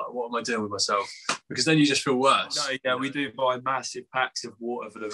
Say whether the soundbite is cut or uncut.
cut